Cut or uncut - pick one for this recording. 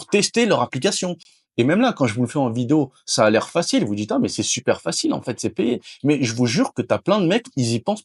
uncut